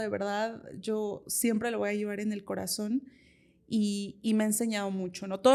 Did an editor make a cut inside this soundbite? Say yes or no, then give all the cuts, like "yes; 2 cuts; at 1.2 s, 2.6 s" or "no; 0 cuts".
no; 0 cuts